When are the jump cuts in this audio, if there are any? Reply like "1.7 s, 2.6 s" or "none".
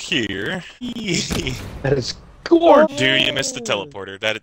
0.8 s, 2.9 s